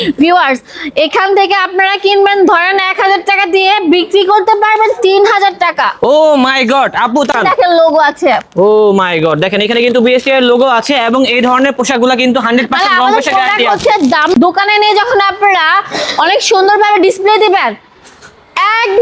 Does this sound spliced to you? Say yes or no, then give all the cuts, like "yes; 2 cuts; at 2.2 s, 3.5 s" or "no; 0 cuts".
yes; 2 cuts; at 7.4 s, 14.3 s